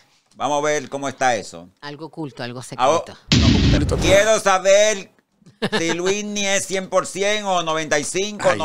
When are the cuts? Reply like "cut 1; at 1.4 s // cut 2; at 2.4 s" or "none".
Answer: cut 1; at 3.8 s